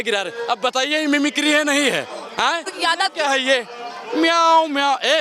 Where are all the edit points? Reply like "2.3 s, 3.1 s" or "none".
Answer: 2.7 s